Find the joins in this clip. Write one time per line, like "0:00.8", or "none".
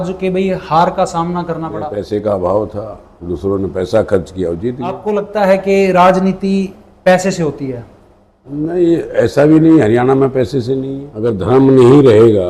0:02.0
0:05.0
0:11.0